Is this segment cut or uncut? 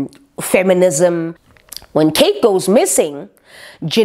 cut